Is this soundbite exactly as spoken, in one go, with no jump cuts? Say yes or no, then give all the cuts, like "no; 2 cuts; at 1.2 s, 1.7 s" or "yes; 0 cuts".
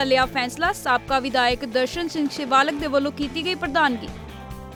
yes; 0 cuts